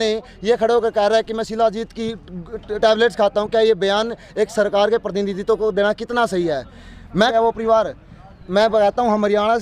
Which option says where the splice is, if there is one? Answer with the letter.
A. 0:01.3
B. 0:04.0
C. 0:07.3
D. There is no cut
C